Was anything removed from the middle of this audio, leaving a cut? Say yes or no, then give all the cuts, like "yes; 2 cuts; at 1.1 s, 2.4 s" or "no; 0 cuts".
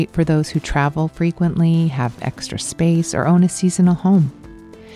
no; 0 cuts